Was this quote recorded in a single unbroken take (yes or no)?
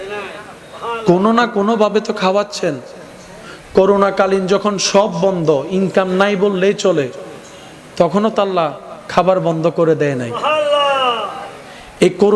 yes